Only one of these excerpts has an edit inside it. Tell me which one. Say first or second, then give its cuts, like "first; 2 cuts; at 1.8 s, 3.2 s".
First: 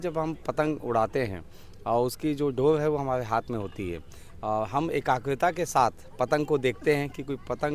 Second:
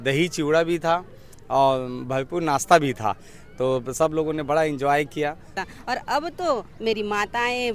second; 1 cut; at 5.6 s